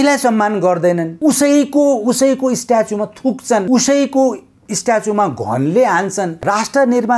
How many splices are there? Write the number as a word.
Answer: three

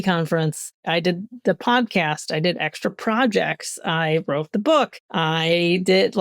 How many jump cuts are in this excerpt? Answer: three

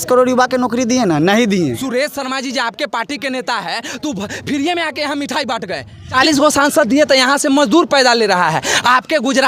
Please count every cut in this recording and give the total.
two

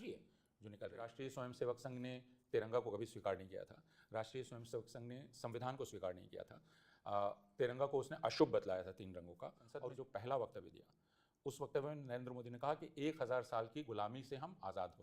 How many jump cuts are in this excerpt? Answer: two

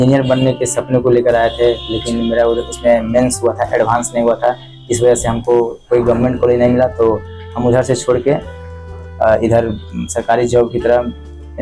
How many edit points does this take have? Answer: zero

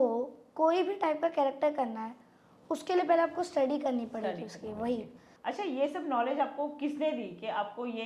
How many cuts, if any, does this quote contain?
one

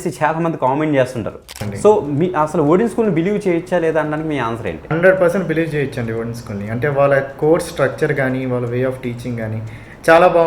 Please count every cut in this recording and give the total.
two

